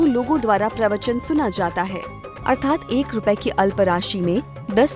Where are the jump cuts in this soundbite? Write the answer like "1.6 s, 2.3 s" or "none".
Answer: none